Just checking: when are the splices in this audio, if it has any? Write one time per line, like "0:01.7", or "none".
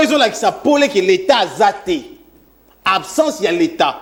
none